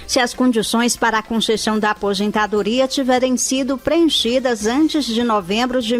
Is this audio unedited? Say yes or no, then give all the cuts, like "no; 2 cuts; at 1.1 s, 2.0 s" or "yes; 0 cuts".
yes; 0 cuts